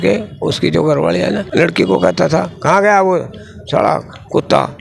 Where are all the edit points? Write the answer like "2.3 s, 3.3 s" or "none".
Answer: 1.4 s